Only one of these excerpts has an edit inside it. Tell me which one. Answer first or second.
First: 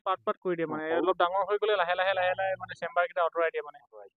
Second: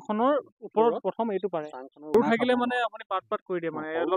second